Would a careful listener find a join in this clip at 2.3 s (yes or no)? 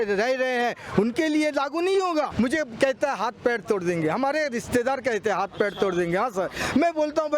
yes